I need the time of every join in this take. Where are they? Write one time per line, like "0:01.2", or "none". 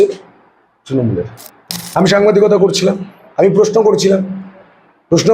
0:01.8

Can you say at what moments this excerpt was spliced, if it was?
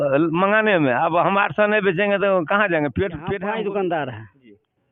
0:03.3

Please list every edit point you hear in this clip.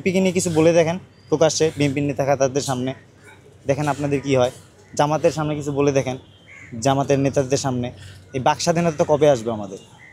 none

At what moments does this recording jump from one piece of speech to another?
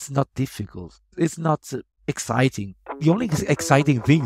0:01.0
0:02.9

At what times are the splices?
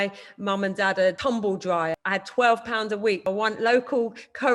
0:01.2
0:02.0
0:03.2

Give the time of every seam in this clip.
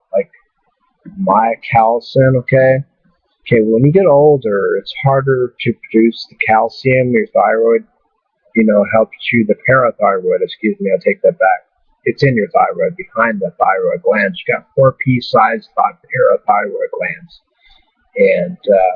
0:16.5

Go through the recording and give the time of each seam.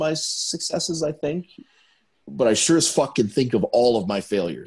none

